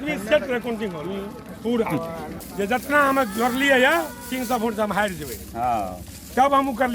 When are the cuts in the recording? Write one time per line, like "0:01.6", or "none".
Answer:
none